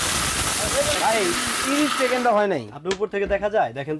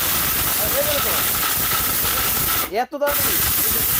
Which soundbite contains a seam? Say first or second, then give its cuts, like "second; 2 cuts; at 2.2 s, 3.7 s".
first; 1 cut; at 1.0 s